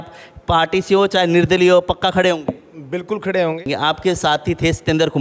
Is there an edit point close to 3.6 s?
yes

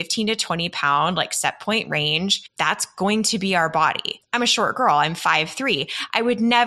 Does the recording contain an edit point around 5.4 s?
no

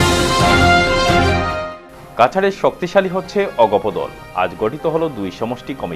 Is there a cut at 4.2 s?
no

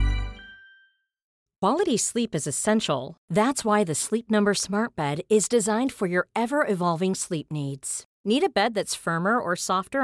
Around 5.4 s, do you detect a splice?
no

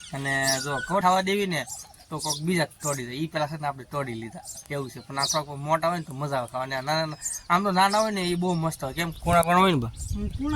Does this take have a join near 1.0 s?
yes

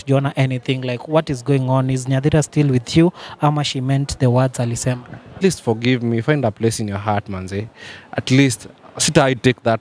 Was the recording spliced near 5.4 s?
yes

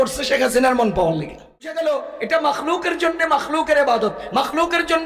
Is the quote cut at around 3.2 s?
no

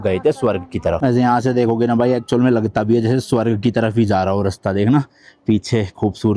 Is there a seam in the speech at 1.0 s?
yes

